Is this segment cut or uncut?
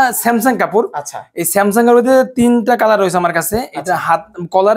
uncut